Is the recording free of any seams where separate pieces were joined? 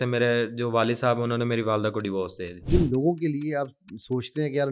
no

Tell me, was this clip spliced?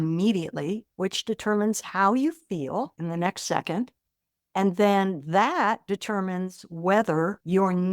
no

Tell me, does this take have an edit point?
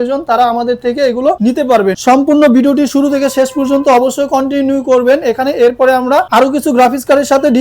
yes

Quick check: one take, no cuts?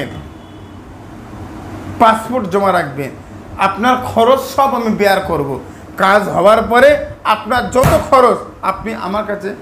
yes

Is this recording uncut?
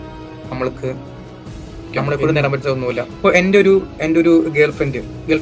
no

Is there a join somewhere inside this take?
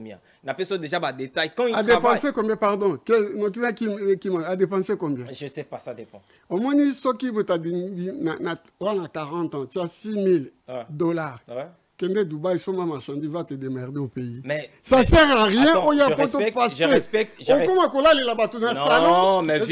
no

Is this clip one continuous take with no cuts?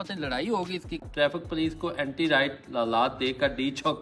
no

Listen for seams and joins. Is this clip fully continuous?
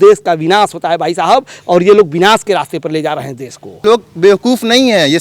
no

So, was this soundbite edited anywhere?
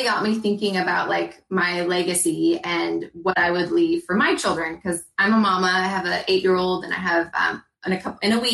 no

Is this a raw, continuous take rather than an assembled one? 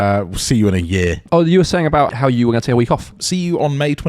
no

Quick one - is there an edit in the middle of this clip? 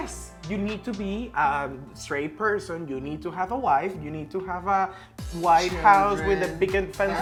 no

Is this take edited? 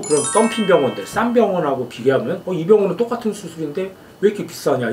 no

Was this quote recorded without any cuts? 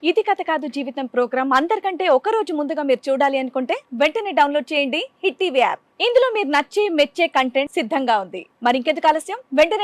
yes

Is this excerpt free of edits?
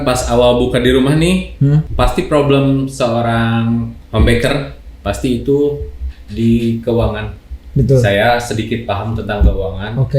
no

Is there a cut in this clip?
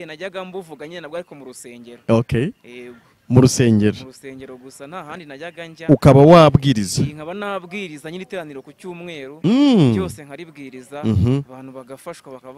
no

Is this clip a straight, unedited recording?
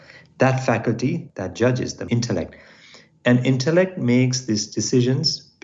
no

